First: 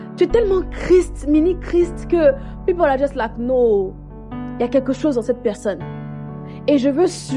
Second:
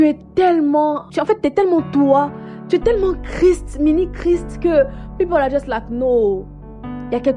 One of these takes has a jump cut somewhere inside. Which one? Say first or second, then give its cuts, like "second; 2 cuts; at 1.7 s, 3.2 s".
second; 1 cut; at 1.1 s